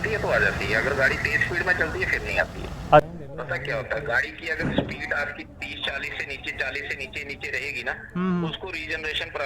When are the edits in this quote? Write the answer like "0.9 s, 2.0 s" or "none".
3.1 s